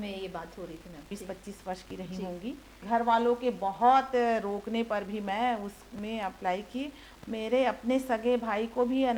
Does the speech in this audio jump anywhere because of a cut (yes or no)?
yes